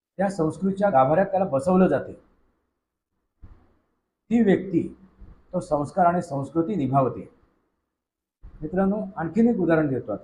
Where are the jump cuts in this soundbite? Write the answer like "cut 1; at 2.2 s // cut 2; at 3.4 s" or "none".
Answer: cut 1; at 0.9 s